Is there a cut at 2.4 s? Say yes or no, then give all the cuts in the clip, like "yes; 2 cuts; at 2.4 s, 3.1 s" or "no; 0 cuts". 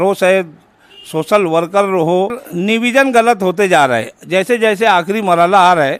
yes; 1 cut; at 2.4 s